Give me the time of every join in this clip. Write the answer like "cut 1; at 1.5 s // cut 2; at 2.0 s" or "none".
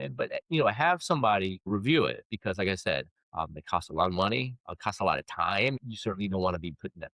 cut 1; at 5.8 s